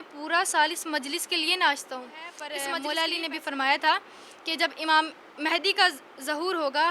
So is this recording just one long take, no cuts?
no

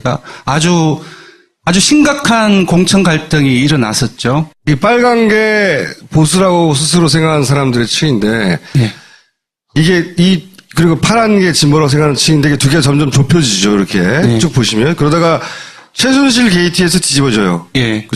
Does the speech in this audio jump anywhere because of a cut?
yes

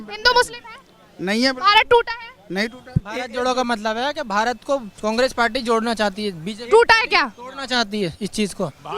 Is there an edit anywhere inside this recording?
yes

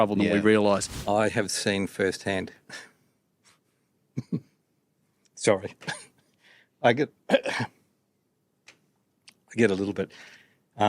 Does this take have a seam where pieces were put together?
yes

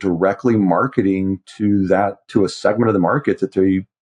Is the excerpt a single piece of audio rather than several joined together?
yes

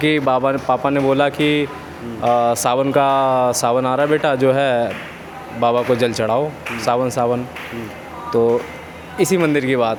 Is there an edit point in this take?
no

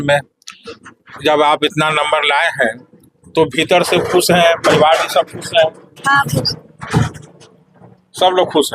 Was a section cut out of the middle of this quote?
yes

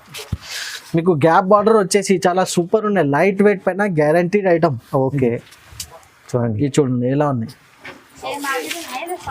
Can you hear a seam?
no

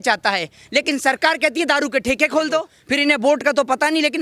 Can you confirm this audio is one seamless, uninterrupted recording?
no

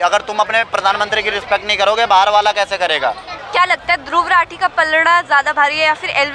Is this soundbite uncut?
yes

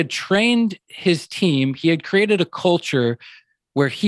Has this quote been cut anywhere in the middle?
no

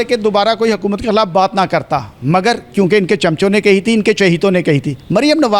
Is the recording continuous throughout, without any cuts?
yes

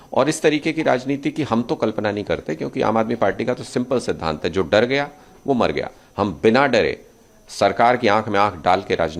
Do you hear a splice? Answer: no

